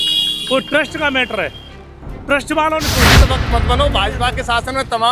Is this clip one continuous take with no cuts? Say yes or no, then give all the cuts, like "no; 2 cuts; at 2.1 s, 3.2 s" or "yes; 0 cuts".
no; 1 cut; at 3.2 s